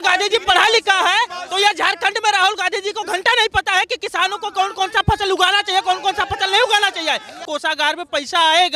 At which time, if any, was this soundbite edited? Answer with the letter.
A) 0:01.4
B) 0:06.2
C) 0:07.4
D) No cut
C